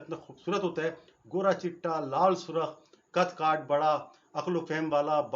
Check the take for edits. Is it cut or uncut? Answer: uncut